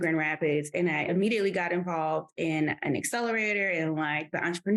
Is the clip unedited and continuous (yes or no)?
no